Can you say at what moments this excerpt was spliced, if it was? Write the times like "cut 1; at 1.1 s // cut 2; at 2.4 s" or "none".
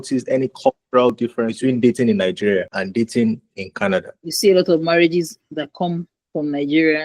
cut 1; at 1.2 s // cut 2; at 2.7 s // cut 3; at 4.2 s